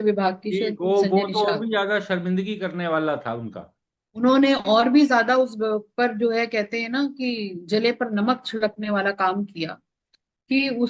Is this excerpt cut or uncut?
uncut